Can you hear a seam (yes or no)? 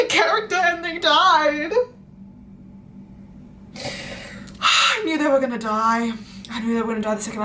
no